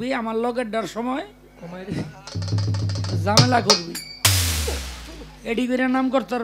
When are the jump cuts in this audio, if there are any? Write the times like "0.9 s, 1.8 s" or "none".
none